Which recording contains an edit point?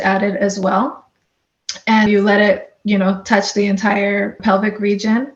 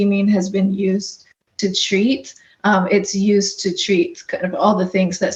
first; 2 cuts; at 2.1 s, 4.4 s

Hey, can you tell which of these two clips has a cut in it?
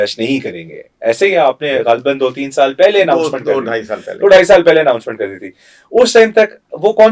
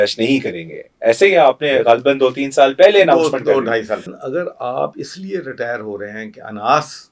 second; 1 cut; at 4.1 s

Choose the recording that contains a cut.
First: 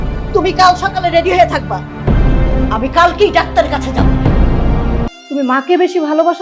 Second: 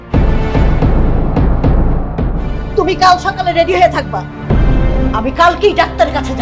first; 1 cut; at 5.1 s

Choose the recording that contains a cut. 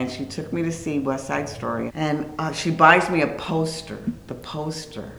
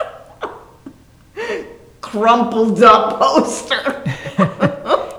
first; 1 cut; at 1.9 s

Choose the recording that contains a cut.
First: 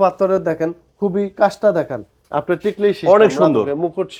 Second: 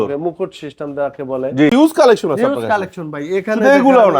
second; 1 cut; at 1.7 s

